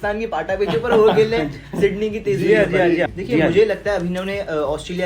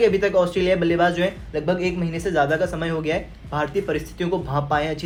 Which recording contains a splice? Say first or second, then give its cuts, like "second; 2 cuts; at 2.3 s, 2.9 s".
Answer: first; 1 cut; at 3.1 s